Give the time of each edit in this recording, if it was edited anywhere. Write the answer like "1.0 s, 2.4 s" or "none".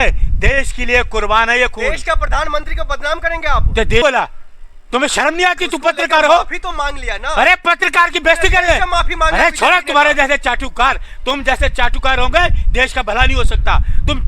4.0 s